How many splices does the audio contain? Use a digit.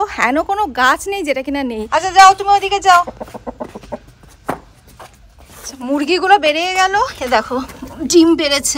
1